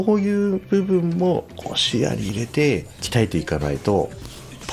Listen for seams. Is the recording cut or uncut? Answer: cut